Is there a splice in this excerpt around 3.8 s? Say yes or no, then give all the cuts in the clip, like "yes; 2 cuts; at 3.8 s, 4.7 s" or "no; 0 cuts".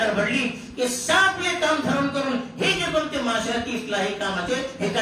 no; 0 cuts